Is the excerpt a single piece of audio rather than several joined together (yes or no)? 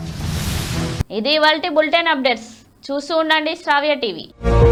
yes